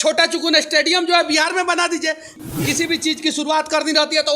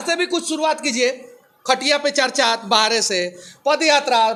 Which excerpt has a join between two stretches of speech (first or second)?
first